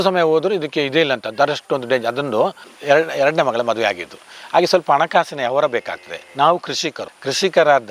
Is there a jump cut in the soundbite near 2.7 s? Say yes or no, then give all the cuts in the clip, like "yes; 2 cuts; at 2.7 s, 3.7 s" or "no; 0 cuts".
yes; 1 cut; at 2.7 s